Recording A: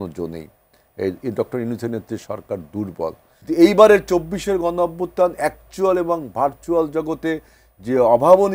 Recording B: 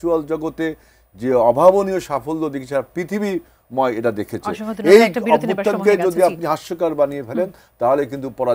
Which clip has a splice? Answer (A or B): A